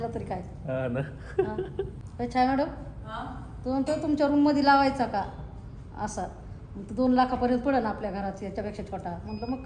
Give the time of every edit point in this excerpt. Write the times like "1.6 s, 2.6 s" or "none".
none